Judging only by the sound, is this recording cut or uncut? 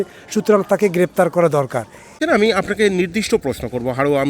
cut